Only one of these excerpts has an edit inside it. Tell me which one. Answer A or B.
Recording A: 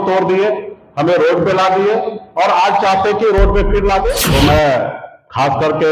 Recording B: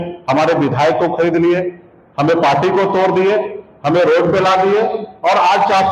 A